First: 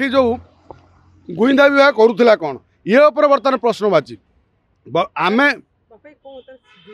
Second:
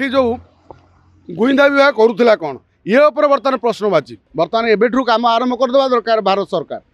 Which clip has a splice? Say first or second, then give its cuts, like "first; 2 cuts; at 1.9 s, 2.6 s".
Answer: second; 1 cut; at 4.2 s